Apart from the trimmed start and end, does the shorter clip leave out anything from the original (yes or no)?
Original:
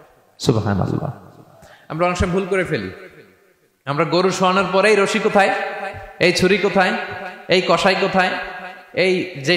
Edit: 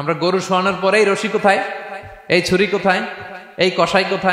no